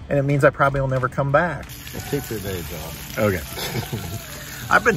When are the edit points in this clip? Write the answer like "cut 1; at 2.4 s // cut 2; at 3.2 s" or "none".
cut 1; at 1.7 s